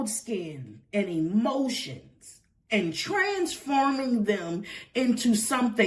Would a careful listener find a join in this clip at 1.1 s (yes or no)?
no